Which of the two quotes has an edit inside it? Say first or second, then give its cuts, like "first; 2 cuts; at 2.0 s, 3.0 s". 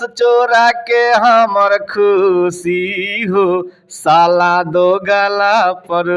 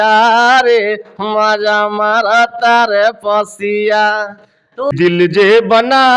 second; 1 cut; at 4.9 s